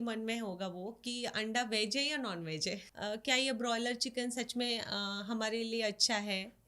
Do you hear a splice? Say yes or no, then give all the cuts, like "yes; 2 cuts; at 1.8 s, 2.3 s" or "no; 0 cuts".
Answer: yes; 1 cut; at 2.9 s